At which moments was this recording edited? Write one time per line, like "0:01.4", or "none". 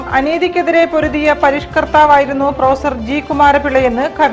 none